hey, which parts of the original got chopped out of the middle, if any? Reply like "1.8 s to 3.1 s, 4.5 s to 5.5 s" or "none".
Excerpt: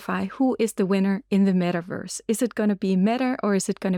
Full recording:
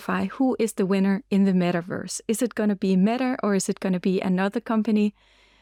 none